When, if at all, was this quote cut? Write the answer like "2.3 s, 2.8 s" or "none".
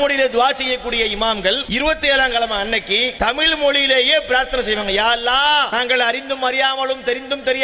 1.6 s, 3.1 s, 5.7 s